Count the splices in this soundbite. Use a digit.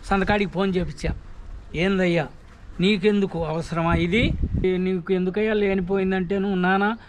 1